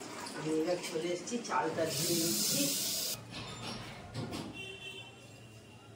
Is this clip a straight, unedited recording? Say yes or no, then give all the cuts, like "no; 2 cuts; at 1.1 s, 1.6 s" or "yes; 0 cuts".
no; 1 cut; at 3.2 s